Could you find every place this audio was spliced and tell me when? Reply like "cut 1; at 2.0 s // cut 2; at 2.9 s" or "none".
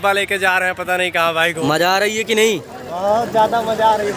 cut 1; at 1.6 s